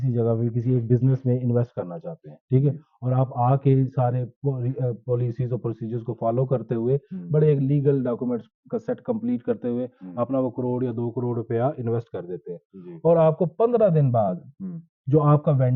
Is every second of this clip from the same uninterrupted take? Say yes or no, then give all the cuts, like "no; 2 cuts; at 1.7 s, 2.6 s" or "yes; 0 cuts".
yes; 0 cuts